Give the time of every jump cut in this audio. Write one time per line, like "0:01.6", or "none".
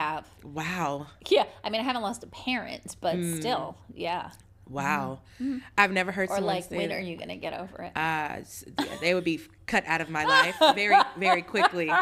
none